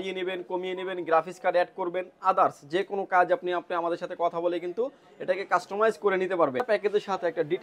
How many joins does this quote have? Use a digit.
1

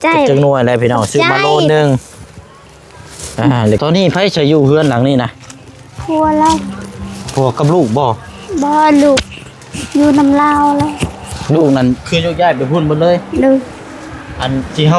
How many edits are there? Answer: 1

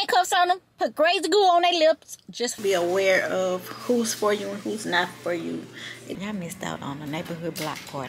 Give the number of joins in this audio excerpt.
2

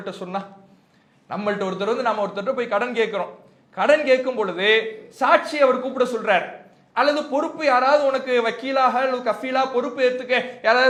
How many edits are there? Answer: 0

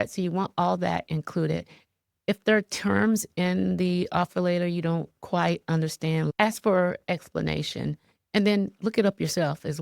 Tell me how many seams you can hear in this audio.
1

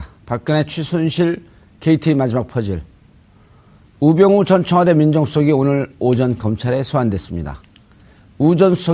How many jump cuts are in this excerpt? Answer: 1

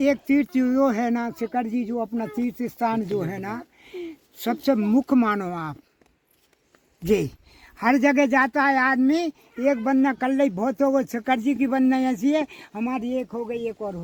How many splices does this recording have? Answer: 0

